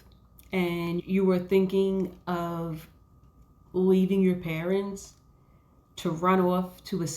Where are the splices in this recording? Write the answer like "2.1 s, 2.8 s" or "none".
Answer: 1.0 s